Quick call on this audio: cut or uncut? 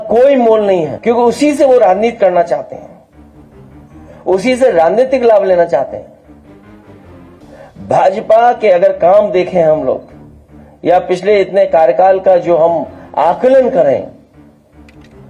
cut